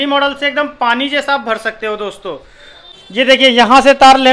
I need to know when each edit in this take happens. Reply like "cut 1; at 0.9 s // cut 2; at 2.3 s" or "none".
cut 1; at 3.0 s